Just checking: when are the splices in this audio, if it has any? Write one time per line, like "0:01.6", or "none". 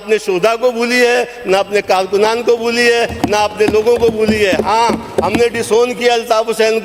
none